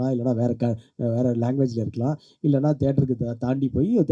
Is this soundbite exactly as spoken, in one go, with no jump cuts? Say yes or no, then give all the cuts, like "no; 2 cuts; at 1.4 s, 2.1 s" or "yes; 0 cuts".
yes; 0 cuts